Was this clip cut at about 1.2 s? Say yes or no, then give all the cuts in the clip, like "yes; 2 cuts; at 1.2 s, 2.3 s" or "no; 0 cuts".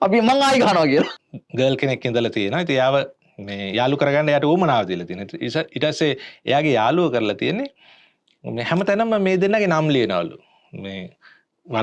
yes; 1 cut; at 1.2 s